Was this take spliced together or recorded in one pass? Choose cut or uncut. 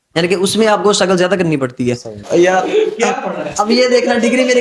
cut